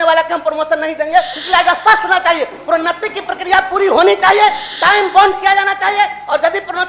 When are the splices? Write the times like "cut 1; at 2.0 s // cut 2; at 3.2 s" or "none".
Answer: cut 1; at 1.3 s